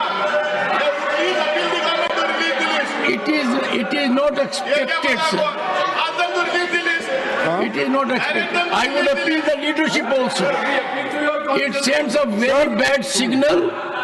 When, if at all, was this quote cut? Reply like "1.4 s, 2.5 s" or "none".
none